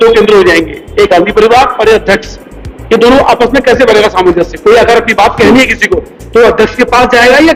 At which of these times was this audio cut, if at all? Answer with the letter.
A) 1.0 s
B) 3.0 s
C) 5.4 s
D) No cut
D